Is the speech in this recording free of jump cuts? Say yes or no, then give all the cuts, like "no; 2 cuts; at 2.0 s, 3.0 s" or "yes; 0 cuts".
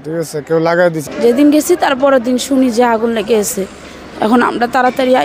no; 1 cut; at 1.0 s